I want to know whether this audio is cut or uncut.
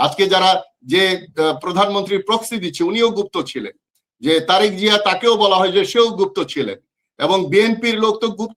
uncut